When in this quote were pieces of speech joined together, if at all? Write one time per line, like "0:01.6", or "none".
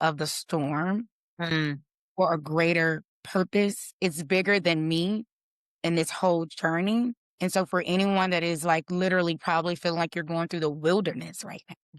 0:03.1
0:07.3